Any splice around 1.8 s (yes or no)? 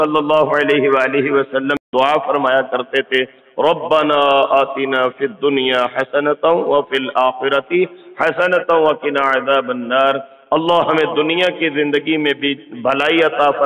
yes